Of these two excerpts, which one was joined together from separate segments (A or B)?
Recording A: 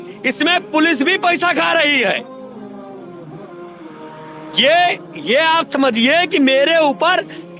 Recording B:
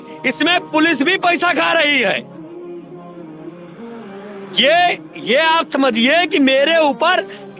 A